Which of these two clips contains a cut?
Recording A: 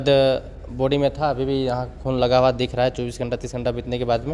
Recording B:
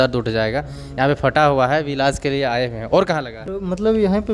B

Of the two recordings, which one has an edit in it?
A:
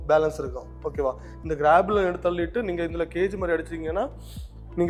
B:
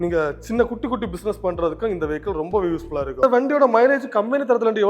B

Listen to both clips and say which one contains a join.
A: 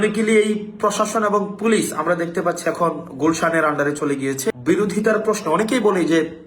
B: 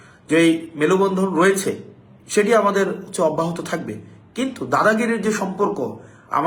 A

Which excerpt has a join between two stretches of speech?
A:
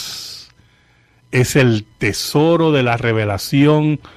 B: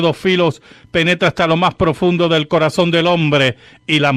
A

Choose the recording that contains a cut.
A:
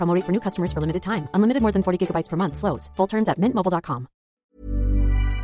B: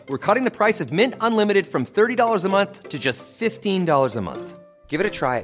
A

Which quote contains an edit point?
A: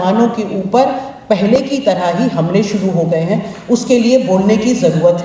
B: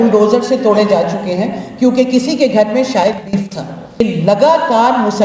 B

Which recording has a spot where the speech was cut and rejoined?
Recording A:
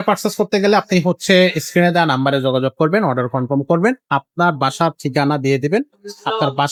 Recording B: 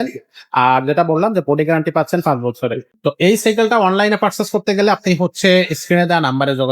B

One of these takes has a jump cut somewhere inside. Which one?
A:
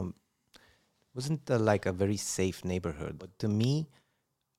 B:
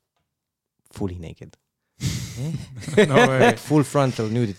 A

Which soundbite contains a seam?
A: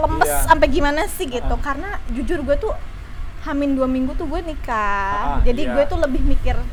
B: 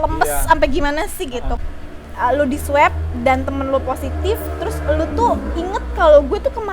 B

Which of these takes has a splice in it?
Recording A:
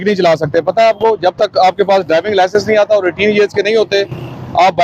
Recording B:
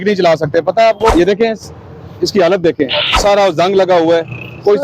B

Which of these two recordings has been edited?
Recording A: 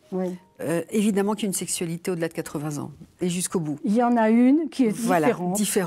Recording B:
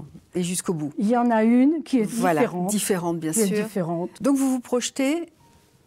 B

